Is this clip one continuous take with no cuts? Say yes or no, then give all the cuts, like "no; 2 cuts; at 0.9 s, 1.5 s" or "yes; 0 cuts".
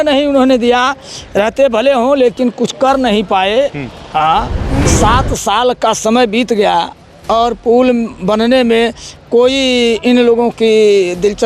no; 1 cut; at 4.9 s